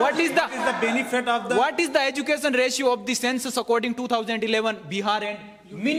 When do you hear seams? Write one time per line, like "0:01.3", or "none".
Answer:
none